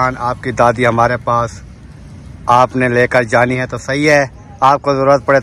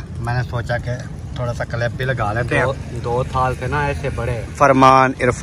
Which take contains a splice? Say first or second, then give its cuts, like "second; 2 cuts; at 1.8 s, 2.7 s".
second; 1 cut; at 4.5 s